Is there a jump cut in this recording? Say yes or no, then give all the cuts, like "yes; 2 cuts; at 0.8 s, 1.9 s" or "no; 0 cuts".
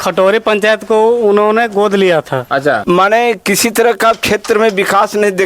yes; 1 cut; at 2.8 s